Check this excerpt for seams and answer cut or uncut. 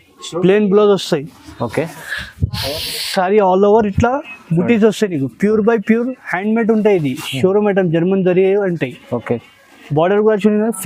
uncut